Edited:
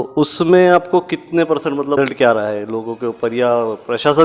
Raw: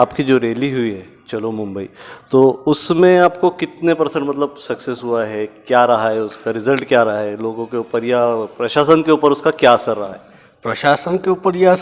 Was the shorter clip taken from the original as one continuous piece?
no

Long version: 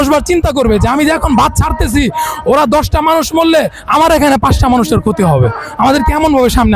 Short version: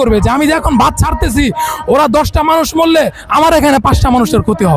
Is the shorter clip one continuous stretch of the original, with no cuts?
yes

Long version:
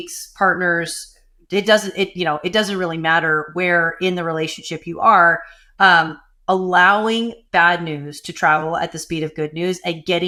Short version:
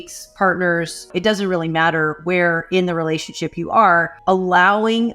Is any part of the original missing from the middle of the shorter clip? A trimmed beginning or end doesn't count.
yes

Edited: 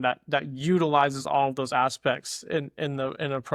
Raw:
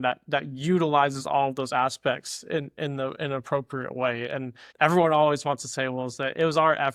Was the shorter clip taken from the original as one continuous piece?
yes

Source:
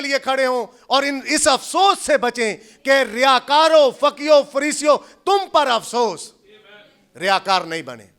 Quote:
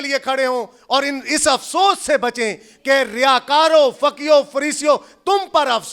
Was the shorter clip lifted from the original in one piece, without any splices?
yes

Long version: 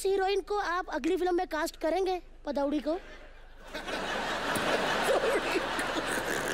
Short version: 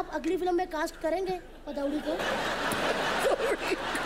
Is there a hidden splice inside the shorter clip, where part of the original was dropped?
yes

